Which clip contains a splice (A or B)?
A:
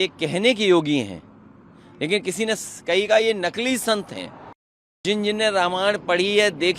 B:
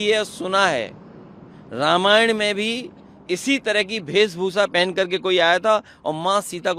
A